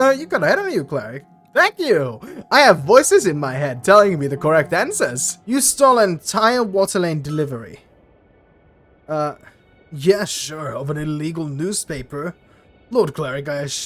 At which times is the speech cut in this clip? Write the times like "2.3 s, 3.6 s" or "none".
5.3 s